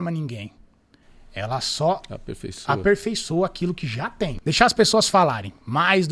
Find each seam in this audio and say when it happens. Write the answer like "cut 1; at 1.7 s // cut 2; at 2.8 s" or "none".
cut 1; at 4.4 s